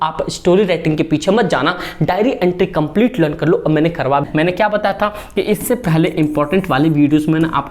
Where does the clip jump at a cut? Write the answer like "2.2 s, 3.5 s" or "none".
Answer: 4.2 s